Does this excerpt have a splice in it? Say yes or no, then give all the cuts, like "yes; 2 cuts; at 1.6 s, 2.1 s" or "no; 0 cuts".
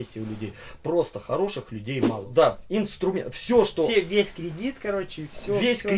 yes; 1 cut; at 2.2 s